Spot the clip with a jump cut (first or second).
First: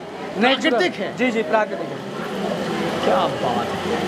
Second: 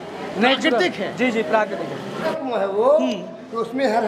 second